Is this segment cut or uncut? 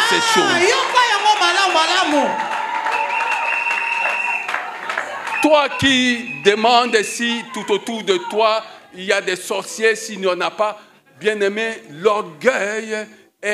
uncut